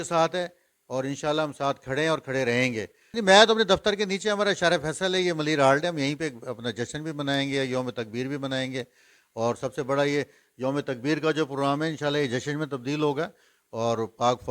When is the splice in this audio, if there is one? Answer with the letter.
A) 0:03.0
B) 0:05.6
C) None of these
A